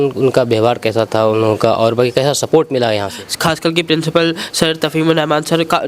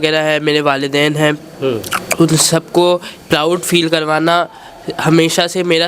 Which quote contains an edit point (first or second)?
first